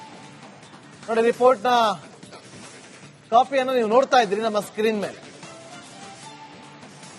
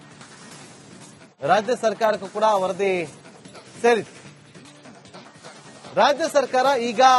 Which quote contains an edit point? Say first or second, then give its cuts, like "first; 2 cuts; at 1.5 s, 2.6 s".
first; 1 cut; at 0.9 s